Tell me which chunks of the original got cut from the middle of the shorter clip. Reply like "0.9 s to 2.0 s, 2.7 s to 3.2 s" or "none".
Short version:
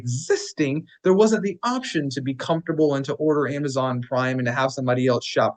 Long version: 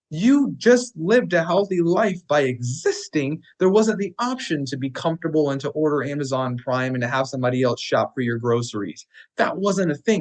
none

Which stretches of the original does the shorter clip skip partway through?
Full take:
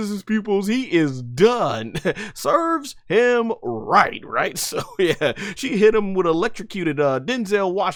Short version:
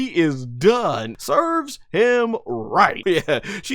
1.9 s to 2.3 s, 4.1 s to 4.9 s

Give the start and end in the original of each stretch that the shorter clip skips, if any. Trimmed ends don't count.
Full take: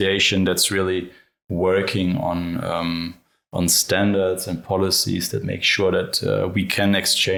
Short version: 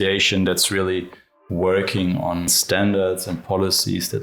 2.5 s to 3.7 s

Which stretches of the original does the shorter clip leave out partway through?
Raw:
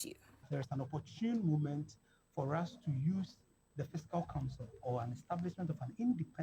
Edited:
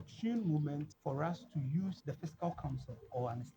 1.9 s to 2.2 s, 3.3 s to 3.7 s

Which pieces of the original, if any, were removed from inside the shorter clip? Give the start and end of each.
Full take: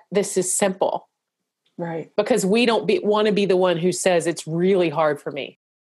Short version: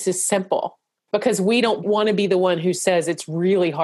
1.2 s to 2.0 s, 2.9 s to 3.0 s

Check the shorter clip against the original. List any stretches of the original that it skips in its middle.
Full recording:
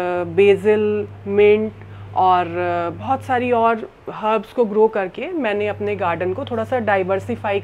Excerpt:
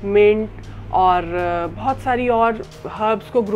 none

